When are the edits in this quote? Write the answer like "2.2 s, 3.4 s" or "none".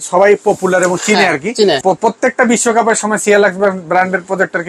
1.8 s